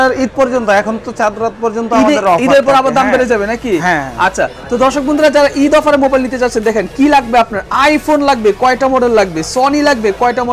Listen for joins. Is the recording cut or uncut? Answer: uncut